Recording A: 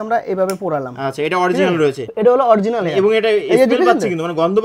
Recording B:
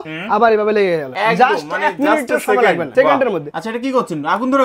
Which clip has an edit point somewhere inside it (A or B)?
B